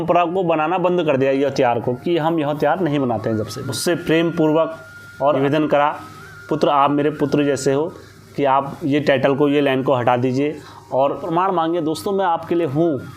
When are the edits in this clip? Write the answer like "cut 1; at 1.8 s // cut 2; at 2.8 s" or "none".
cut 1; at 3.6 s // cut 2; at 11.3 s